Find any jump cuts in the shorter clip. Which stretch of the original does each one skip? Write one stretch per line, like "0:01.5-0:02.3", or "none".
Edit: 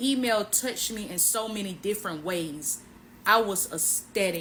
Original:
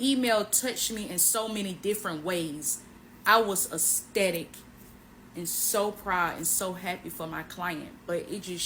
none

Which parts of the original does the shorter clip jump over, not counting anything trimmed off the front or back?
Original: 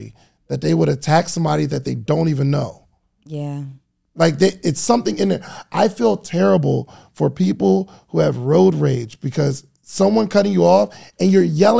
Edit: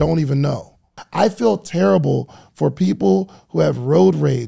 0:03.1-0:05.6

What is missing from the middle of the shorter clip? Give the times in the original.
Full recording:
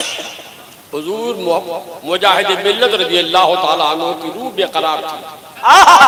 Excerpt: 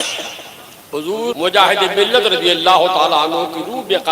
0:01.4-0:02.0

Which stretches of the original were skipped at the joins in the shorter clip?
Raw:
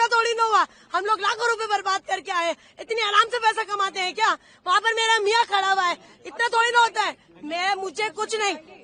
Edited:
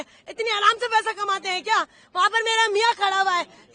none

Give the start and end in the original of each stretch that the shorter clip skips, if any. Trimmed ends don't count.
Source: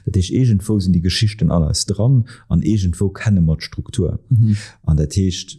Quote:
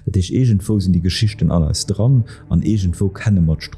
none

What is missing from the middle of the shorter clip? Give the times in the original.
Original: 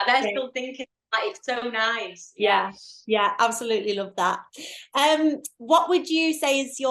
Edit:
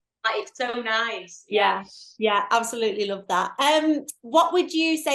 0:04.4-0:04.9

